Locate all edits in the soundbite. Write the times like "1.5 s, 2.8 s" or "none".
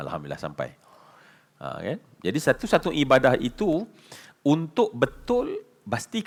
none